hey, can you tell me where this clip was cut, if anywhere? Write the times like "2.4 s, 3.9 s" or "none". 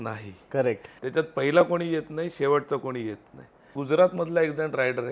0.9 s, 3.7 s